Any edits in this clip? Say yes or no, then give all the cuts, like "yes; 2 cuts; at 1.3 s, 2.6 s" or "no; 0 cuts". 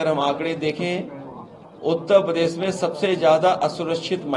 no; 0 cuts